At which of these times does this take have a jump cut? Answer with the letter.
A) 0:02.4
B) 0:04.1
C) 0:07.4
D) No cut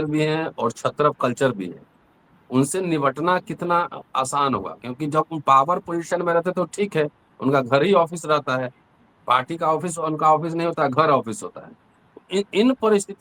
D